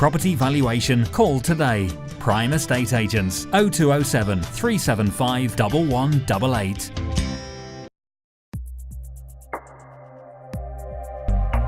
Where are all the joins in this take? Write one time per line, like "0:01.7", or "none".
0:08.0